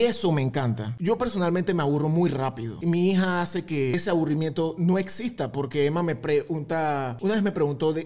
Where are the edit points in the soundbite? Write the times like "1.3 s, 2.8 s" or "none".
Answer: 0.9 s, 2.7 s, 3.9 s, 7.1 s